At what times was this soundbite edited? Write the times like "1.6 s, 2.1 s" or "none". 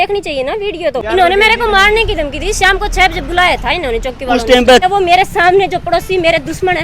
1.0 s, 4.8 s